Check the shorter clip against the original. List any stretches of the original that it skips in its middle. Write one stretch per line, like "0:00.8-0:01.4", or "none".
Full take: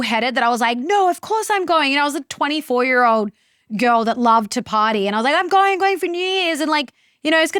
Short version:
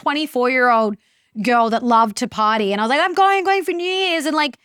none